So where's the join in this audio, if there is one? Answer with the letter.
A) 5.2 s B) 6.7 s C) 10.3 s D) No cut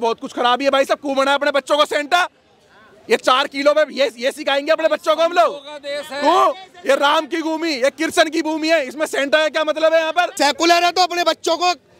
C